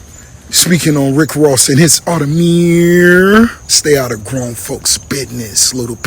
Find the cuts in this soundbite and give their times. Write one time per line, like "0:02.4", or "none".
0:03.7